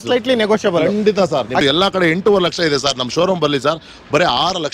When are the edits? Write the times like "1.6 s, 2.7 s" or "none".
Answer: 1.6 s